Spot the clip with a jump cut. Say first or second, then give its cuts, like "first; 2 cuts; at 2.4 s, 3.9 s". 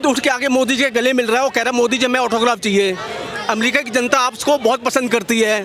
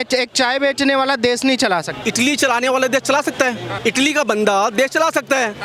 second; 2 cuts; at 2.0 s, 3.7 s